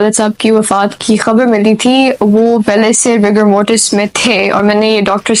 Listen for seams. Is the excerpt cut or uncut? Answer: uncut